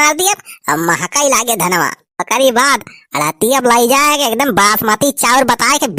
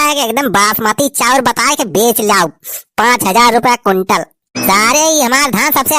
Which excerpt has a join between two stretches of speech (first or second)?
second